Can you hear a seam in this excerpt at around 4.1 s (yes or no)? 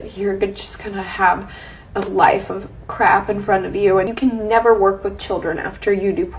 yes